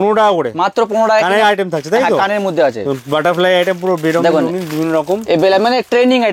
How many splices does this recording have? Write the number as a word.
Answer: zero